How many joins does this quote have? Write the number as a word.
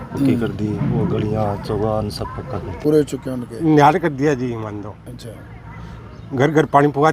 one